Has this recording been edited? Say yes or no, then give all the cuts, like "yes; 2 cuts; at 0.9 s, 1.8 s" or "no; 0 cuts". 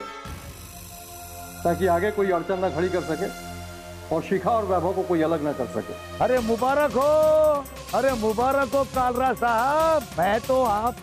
no; 0 cuts